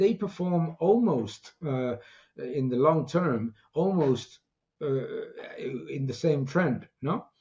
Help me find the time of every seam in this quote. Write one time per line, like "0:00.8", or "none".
none

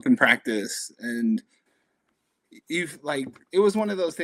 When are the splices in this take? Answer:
none

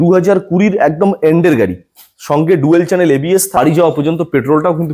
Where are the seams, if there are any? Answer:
0:03.6

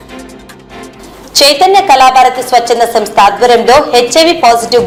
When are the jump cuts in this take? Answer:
none

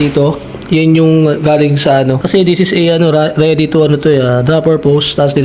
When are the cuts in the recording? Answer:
0:02.2

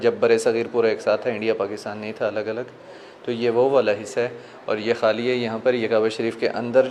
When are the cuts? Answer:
none

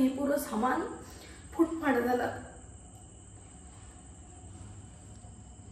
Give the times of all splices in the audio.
0:03.9

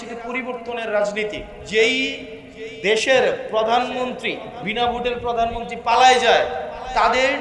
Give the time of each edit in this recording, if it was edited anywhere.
0:01.5
0:04.5

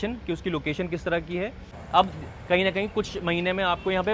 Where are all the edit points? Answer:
0:01.8

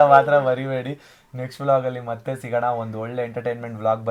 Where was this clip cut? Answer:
none

